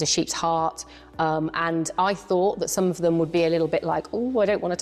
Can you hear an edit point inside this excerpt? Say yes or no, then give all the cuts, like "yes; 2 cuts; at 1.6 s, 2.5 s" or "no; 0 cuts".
no; 0 cuts